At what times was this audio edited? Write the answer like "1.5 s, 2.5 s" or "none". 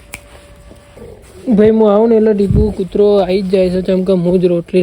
1.0 s